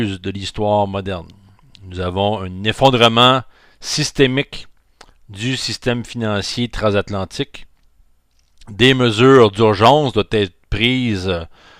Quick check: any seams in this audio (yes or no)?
yes